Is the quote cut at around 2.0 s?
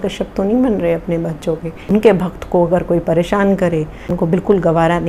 yes; 2 cuts; at 2.0 s, 4.1 s

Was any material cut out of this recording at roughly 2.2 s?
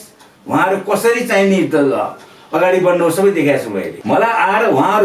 no; 1 cut; at 3.9 s

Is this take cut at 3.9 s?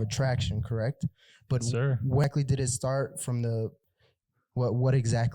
yes; 2 cuts; at 2.2 s, 3.9 s

